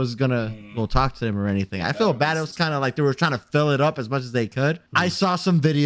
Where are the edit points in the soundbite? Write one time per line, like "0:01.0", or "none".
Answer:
0:04.9